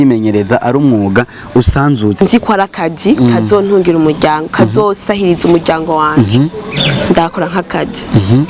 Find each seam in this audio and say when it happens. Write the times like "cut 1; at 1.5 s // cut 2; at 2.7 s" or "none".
cut 1; at 2.2 s